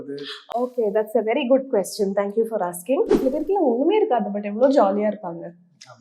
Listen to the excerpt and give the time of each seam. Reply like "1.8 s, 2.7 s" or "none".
3.1 s